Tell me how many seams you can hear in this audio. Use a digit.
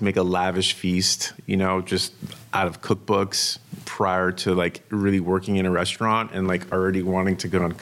0